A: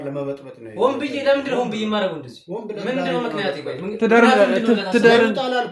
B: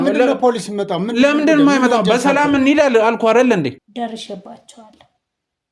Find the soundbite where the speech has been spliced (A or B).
B